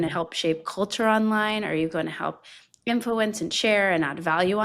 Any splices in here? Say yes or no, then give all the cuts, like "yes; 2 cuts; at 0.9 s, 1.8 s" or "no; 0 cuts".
no; 0 cuts